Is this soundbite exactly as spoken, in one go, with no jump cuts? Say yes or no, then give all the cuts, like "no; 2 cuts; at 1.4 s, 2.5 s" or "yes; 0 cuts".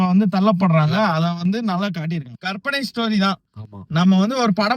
no; 1 cut; at 2.4 s